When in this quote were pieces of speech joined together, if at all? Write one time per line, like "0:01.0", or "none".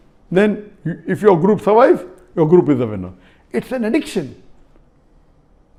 none